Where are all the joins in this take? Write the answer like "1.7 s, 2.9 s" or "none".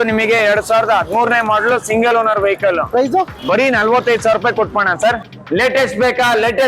5.3 s